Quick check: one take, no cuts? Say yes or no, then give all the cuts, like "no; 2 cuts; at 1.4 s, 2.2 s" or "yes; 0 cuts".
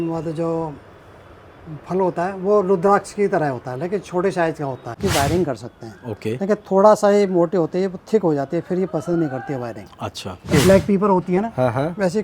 no; 2 cuts; at 4.9 s, 10.5 s